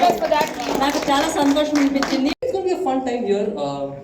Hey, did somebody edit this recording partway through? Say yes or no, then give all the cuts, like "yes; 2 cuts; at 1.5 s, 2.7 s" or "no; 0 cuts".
yes; 1 cut; at 2.3 s